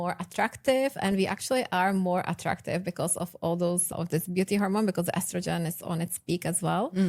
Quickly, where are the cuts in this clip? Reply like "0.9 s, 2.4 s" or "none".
none